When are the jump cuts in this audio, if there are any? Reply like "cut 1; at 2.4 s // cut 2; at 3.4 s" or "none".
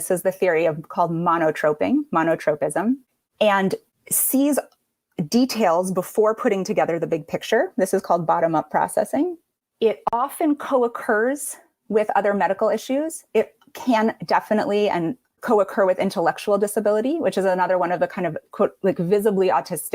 none